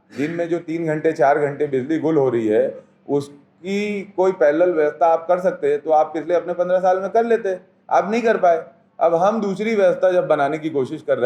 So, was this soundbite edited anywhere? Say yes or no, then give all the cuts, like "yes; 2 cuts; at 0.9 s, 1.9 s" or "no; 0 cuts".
no; 0 cuts